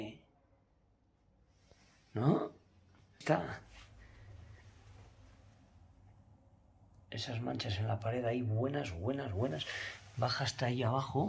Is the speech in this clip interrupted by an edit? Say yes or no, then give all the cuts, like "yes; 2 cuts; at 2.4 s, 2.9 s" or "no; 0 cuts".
no; 0 cuts